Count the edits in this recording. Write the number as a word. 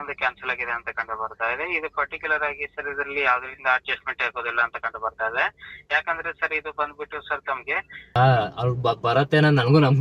one